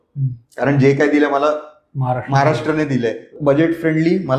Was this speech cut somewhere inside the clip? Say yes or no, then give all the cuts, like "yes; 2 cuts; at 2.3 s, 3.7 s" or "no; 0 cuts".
yes; 1 cut; at 3.3 s